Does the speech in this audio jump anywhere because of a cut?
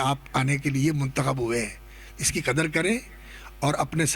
no; 0 cuts

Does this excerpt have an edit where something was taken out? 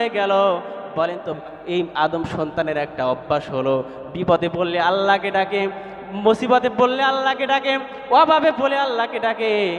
yes; 1 cut; at 1.4 s

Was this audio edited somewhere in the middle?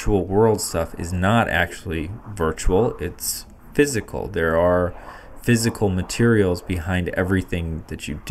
no; 0 cuts

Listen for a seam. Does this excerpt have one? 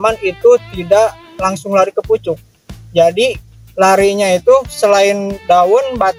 no; 0 cuts

